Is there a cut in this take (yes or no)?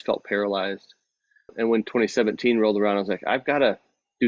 yes